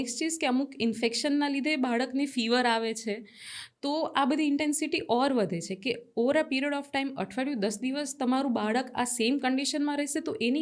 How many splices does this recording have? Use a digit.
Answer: 0